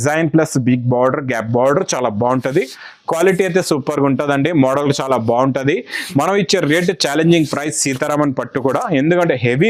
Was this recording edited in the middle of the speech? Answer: no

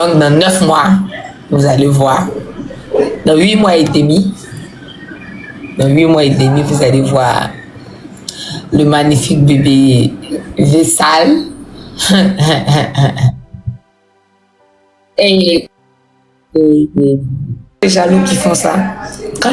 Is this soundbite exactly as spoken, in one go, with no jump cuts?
no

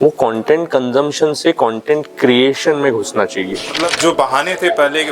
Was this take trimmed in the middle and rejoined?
yes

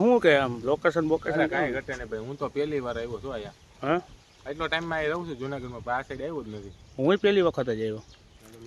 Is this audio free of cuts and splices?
yes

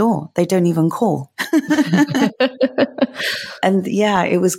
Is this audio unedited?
yes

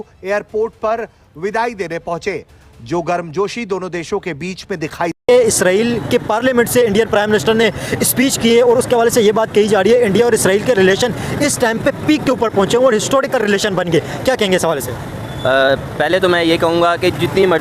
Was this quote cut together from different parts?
yes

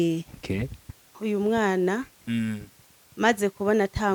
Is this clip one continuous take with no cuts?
no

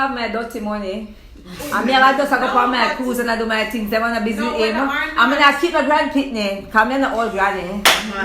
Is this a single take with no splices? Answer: yes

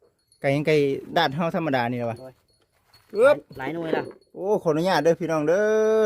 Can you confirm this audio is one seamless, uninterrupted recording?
yes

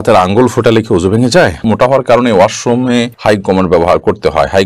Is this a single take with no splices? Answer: no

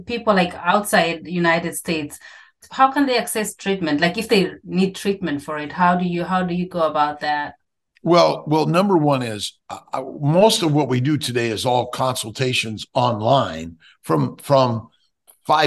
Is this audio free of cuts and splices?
no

